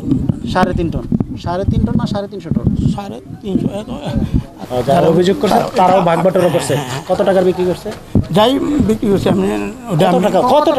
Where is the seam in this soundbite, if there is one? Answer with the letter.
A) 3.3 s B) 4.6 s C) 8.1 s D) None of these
B